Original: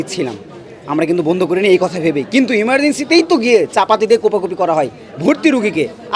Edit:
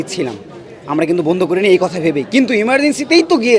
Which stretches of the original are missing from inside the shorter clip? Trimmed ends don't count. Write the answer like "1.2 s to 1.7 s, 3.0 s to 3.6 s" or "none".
none